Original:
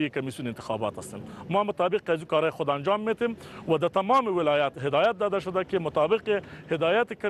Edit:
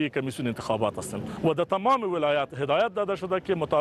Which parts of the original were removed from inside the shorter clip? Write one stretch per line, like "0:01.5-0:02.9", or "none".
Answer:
0:01.2-0:03.5